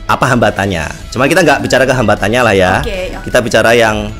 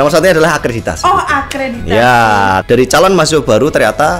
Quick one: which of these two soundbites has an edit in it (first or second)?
second